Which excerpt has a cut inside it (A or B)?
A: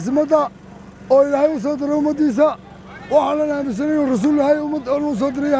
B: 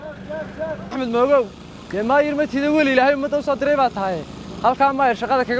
B